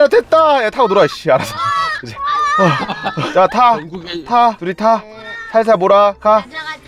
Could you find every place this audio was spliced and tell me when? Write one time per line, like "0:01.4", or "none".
none